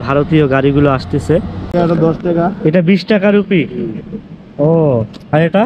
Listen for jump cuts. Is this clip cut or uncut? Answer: cut